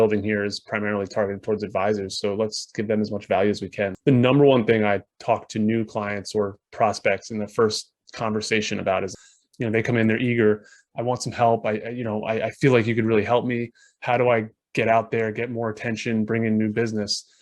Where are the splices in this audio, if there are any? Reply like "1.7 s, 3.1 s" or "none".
4.0 s, 9.1 s